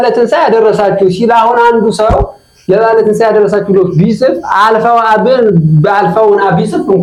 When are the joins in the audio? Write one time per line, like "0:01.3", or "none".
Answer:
none